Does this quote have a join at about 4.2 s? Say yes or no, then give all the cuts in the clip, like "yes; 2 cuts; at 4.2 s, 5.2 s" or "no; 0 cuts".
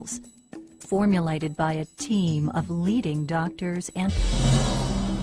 no; 0 cuts